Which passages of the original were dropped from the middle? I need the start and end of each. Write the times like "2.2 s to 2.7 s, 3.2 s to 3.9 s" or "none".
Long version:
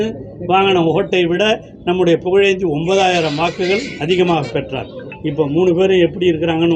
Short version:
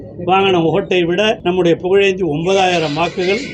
1.6 s to 1.8 s